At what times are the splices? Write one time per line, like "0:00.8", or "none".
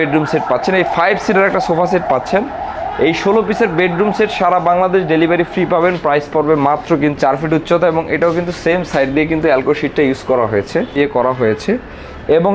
0:07.2
0:10.9